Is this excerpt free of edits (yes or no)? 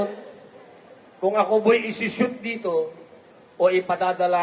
yes